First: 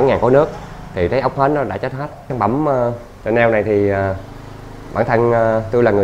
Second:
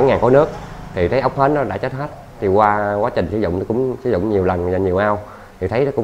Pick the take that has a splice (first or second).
first